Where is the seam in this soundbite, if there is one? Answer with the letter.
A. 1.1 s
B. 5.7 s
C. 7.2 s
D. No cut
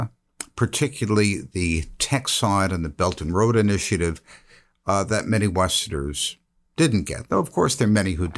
D